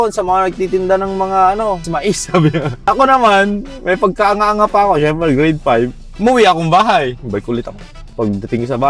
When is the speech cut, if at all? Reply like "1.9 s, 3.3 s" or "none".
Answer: none